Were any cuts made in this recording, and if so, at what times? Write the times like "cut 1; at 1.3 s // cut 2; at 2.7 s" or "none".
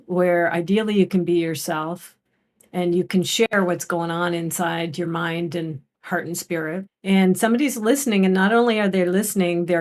cut 1; at 6.9 s